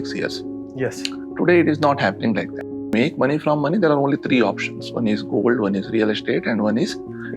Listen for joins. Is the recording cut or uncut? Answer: cut